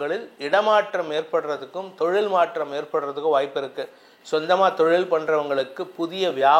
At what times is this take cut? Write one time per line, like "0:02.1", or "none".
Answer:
none